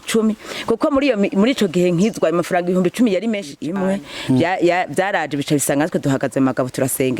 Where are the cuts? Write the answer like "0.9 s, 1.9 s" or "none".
3.6 s